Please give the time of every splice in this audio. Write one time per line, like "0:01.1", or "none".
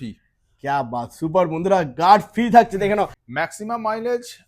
0:03.2